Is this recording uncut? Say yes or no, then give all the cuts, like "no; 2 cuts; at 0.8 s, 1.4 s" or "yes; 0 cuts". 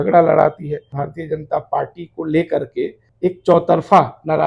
no; 2 cuts; at 1.0 s, 3.0 s